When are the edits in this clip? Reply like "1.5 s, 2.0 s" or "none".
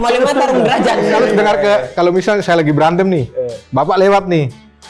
1.0 s